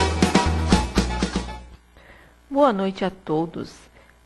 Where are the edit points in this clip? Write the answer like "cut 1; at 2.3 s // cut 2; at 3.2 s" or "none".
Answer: none